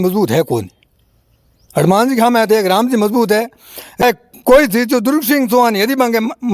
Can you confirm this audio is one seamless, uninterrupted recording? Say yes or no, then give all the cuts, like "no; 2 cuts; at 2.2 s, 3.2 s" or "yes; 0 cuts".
no; 1 cut; at 4.0 s